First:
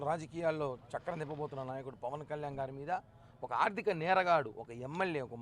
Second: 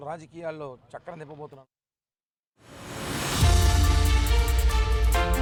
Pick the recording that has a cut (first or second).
first